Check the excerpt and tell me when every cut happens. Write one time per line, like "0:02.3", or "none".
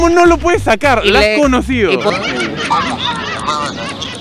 0:02.1